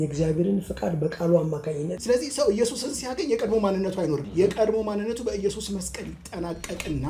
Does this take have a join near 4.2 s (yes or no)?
yes